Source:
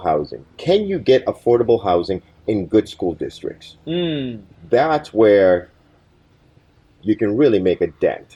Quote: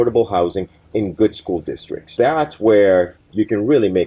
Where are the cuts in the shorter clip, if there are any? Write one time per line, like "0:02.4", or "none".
0:02.0
0:03.2